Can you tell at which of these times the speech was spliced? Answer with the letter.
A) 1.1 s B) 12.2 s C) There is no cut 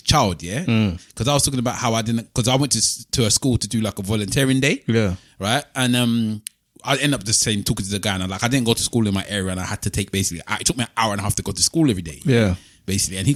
C